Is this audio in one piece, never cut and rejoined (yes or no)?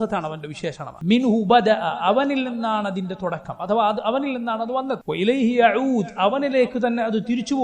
no